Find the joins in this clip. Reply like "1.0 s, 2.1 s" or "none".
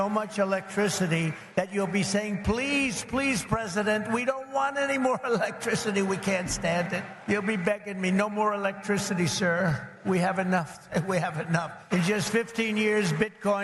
1.4 s, 7.1 s, 9.9 s, 11.8 s